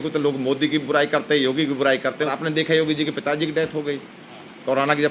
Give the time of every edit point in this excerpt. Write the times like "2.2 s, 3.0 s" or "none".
2.3 s

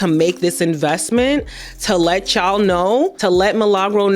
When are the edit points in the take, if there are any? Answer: 3.1 s

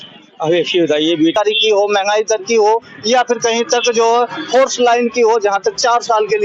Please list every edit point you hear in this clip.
1.3 s

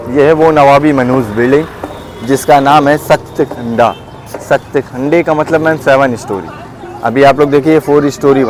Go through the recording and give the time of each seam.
none

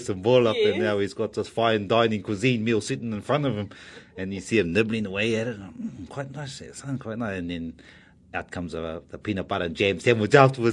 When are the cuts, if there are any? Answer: none

